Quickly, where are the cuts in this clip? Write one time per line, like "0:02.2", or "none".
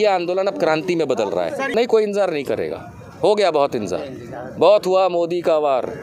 0:01.7

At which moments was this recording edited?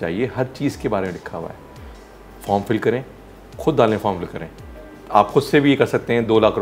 none

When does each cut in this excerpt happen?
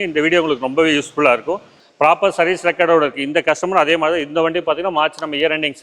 0:01.8

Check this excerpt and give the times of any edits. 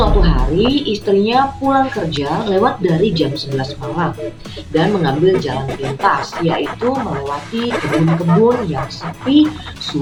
none

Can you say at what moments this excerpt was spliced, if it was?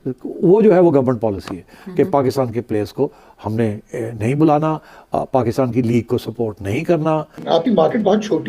0:07.4

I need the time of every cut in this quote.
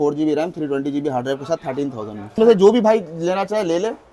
0:02.3

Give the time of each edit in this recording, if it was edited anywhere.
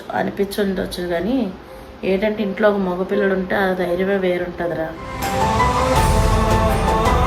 none

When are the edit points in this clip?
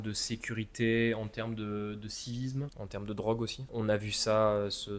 0:02.8
0:03.7

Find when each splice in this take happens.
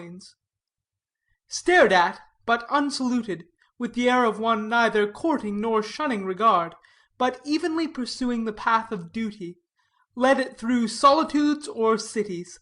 none

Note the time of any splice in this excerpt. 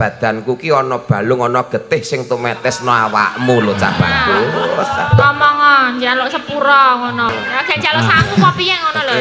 0:07.3

